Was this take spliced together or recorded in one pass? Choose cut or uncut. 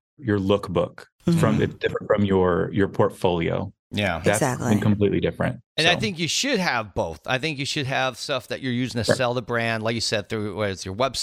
uncut